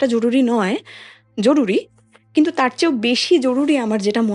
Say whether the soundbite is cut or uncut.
uncut